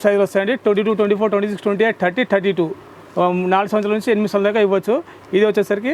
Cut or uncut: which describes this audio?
uncut